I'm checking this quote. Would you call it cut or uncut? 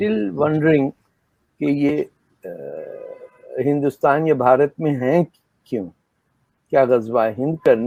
uncut